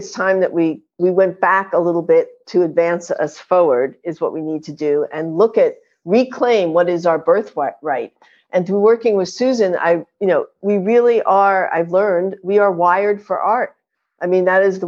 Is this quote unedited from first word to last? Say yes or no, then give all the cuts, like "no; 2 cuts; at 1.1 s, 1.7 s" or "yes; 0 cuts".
yes; 0 cuts